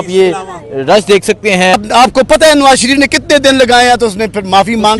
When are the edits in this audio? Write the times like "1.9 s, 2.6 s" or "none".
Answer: 1.7 s